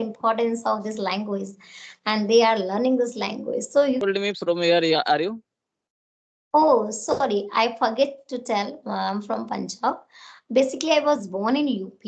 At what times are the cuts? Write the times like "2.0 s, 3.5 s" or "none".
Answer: 4.0 s